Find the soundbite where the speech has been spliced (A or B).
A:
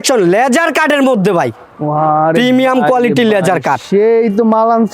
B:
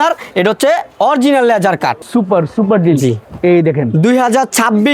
B